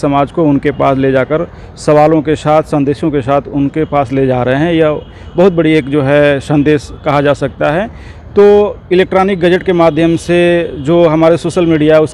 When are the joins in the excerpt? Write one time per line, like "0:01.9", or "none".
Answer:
none